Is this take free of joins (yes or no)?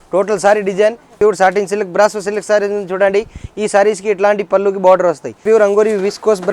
no